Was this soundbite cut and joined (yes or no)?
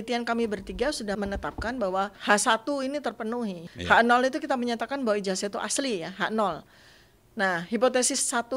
yes